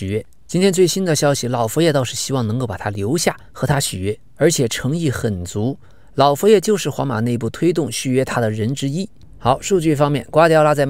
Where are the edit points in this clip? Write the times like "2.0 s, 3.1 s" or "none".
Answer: 9.2 s